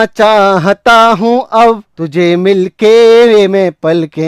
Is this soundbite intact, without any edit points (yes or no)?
yes